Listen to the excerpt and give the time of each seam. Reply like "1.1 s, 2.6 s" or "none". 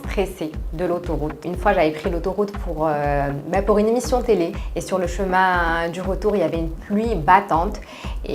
1.5 s, 4.6 s